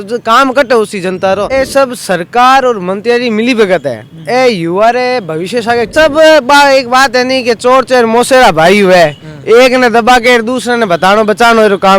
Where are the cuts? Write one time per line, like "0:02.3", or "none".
0:01.5
0:05.9